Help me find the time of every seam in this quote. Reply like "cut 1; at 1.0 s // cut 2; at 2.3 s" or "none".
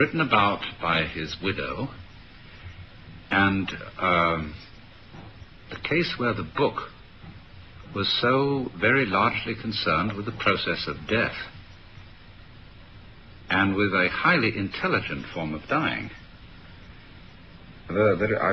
none